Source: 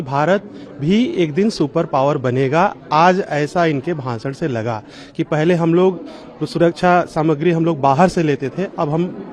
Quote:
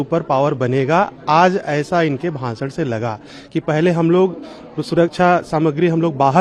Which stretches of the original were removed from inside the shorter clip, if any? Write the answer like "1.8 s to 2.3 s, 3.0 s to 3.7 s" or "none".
none